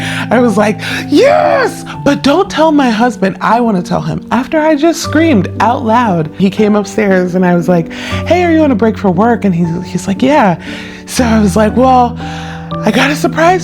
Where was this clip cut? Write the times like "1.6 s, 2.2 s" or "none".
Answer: 6.4 s

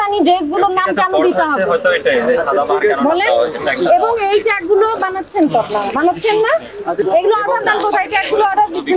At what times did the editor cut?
none

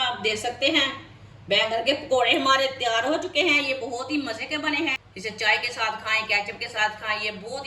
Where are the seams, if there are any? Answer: 5.0 s

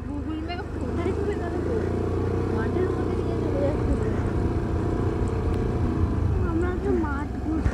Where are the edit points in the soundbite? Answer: none

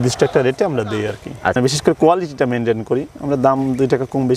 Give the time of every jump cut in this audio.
1.5 s

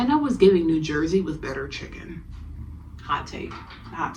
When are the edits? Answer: none

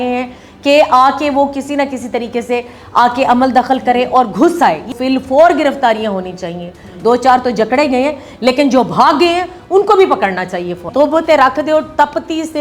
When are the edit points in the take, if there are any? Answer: 4.9 s, 10.8 s

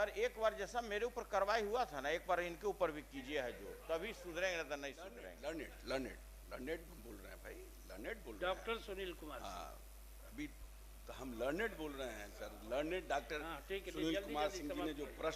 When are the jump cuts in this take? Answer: 5.1 s

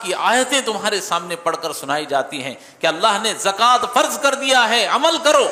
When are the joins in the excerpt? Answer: none

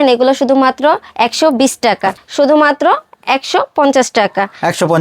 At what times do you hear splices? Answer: 2.2 s

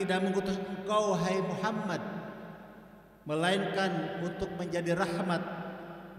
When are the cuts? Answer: none

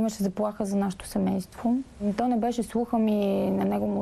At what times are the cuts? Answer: 2.0 s

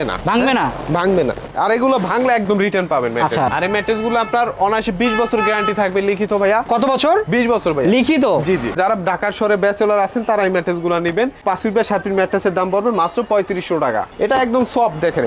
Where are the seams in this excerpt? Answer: 1.4 s, 3.5 s, 8.8 s, 14.1 s

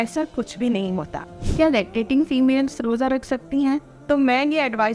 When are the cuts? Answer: 1.4 s

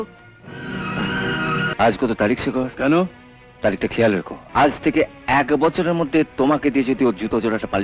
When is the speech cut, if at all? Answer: 1.7 s, 4.4 s

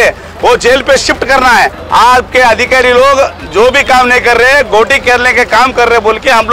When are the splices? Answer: 1.8 s

